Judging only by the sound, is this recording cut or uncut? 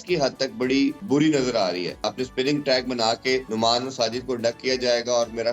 cut